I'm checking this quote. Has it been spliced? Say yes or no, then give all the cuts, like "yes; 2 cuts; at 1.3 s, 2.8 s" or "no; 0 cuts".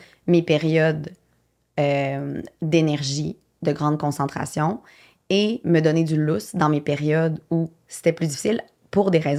no; 0 cuts